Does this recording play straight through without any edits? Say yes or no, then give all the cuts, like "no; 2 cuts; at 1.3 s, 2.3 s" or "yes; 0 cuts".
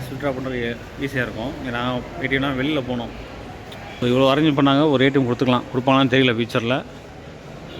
yes; 0 cuts